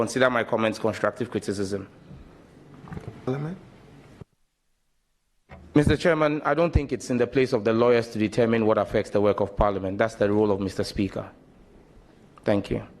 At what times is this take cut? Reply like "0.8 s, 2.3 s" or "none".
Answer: 3.3 s